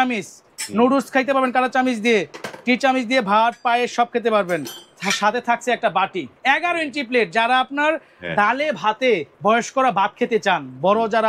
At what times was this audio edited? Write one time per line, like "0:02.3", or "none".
0:06.3
0:09.3